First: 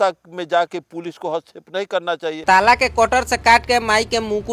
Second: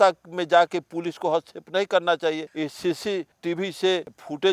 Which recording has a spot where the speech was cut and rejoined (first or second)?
first